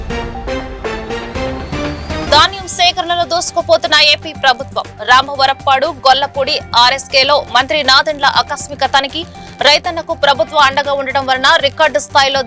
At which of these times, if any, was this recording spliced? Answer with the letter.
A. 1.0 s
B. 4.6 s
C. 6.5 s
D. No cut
D